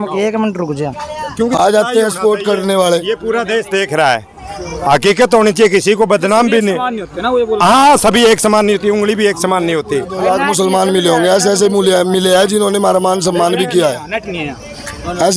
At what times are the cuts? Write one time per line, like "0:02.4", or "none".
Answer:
none